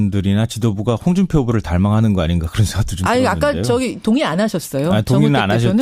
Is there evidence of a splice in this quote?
yes; 1 cut; at 4.0 s

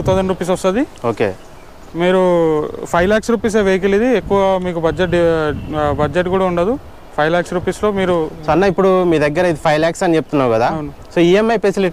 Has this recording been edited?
no; 0 cuts

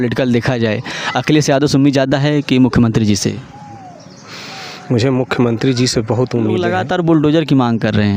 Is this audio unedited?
no; 1 cut; at 6.7 s

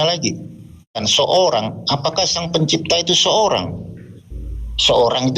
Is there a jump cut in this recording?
yes; 1 cut; at 1.0 s

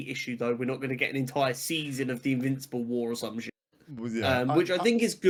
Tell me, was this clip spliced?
no; 0 cuts

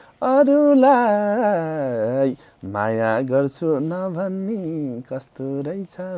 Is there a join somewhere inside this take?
no; 0 cuts

